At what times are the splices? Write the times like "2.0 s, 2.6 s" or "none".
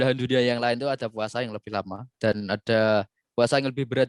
none